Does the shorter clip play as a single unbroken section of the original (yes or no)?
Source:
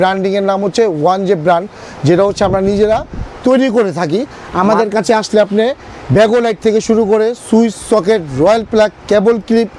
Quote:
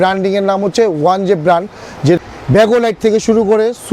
no